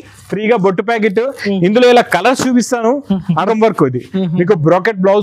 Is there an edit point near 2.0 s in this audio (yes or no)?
no